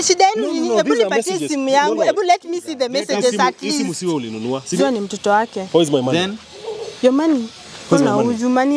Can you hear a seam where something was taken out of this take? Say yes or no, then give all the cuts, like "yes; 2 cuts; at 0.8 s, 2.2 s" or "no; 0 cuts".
yes; 1 cut; at 4.8 s